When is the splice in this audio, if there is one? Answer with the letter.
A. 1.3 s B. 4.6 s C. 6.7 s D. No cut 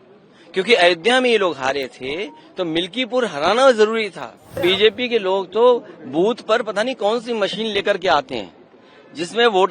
B